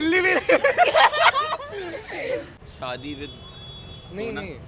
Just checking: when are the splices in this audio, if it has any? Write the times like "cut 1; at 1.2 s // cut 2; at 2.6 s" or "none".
cut 1; at 2.5 s